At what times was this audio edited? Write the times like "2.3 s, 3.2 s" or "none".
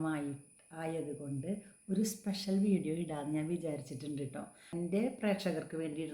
4.7 s